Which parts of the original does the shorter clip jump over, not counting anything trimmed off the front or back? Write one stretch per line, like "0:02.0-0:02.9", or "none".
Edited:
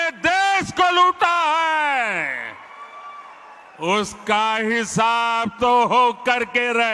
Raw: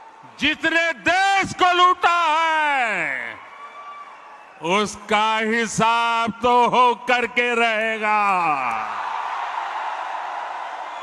none